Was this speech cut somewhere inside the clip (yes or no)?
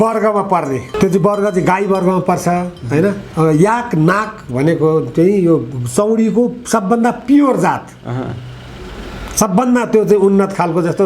yes